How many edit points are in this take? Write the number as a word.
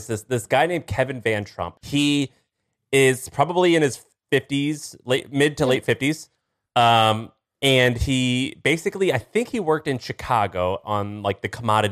one